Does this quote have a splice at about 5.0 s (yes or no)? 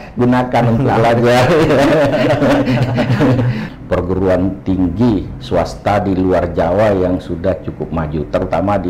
no